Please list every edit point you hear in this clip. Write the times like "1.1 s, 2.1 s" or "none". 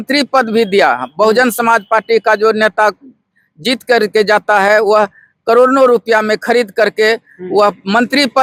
none